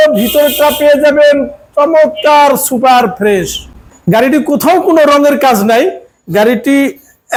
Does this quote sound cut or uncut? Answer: uncut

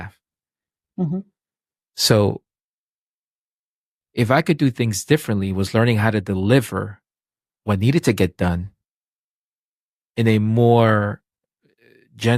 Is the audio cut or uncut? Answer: uncut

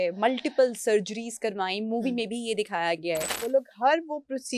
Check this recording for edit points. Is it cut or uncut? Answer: cut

